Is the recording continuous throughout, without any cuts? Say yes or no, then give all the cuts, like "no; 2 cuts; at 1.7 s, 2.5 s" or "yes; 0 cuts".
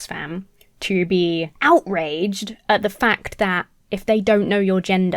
no; 1 cut; at 1.5 s